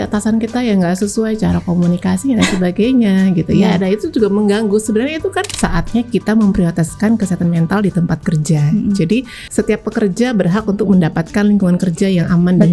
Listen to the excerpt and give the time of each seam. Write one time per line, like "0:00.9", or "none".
0:05.5
0:09.4